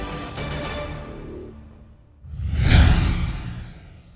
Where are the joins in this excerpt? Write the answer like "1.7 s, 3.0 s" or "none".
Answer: none

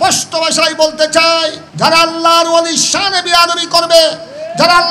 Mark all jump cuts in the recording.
1.6 s

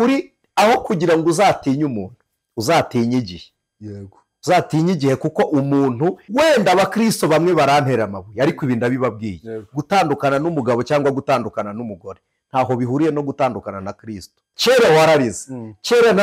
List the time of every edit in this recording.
6.2 s, 14.5 s

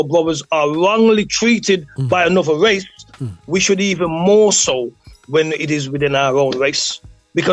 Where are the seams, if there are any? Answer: none

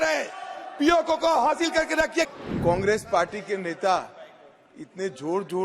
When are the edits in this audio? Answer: 2.3 s

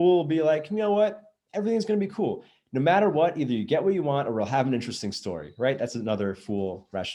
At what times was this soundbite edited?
none

